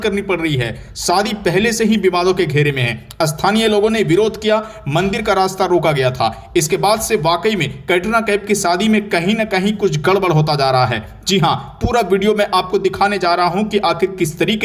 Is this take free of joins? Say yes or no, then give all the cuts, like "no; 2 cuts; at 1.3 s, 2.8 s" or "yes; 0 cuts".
yes; 0 cuts